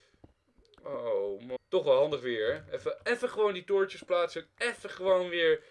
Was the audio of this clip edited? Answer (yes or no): yes